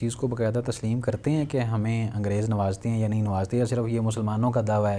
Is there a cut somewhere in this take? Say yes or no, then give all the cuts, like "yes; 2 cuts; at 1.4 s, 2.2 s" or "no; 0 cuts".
no; 0 cuts